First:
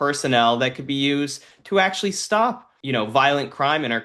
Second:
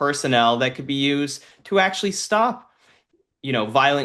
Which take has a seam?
first; 1 cut; at 2.7 s

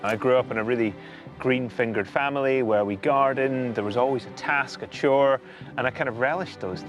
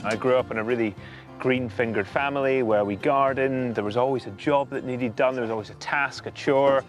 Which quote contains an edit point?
first; 1 cut; at 4.3 s

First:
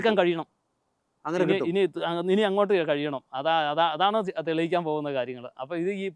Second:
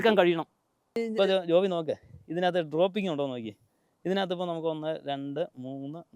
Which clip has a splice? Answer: second; 1 cut; at 1.0 s

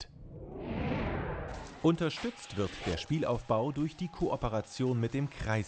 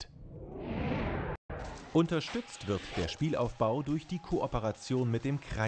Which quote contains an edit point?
first; 1 cut; at 1.4 s

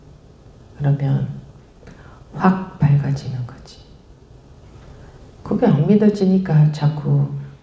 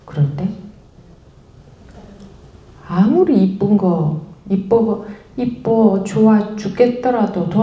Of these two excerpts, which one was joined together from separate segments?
first; 1 cut; at 4.8 s

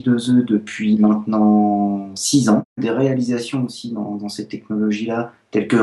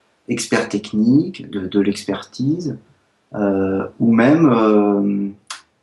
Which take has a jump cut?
first; 1 cut; at 2.8 s

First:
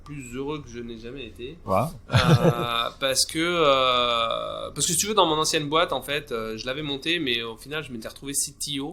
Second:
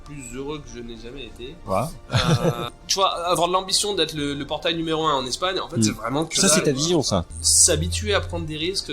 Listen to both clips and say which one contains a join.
second; 2 cuts; at 2.8 s, 7.3 s

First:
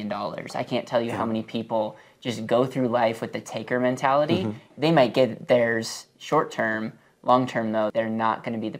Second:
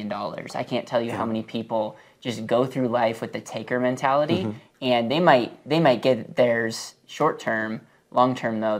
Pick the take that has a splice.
first; 2 cuts; at 4.7 s, 7.9 s

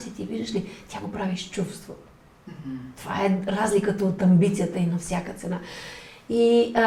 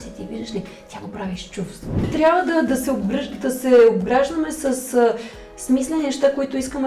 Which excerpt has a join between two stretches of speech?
second; 1 cut; at 2.1 s

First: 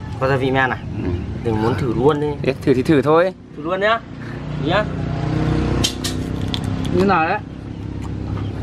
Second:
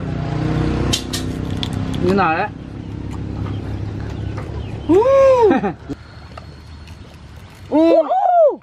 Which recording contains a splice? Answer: second; 1 cut; at 5.8 s

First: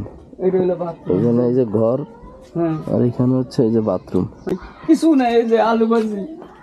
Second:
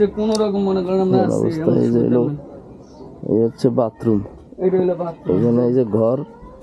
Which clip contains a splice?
first; 1 cut; at 4.7 s

